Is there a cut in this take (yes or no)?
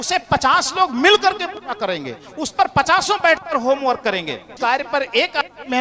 yes